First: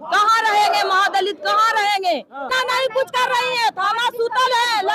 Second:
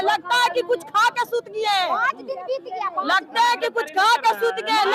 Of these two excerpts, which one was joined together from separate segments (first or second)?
first